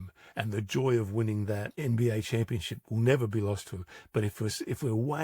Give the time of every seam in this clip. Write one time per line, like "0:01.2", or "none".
0:01.7